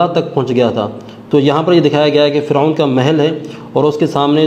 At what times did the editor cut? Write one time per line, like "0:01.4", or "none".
none